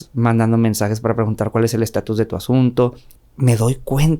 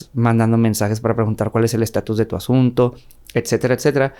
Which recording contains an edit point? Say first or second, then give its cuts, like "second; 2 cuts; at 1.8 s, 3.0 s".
first; 1 cut; at 3.2 s